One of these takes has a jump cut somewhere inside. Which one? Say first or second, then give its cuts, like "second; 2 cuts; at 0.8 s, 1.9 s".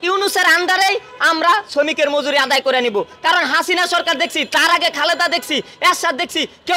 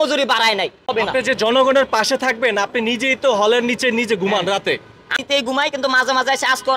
second; 2 cuts; at 0.9 s, 5.2 s